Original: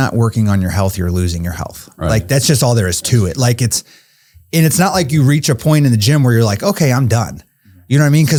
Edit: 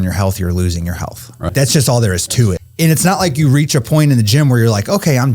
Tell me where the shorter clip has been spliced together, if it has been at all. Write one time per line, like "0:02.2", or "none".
0:01.5
0:02.6